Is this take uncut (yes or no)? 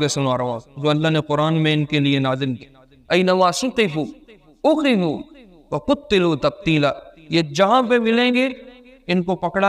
yes